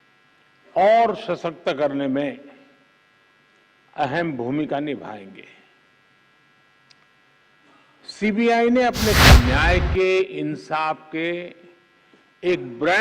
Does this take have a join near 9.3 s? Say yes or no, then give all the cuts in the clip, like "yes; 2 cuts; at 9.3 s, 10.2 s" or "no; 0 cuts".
yes; 1 cut; at 9.3 s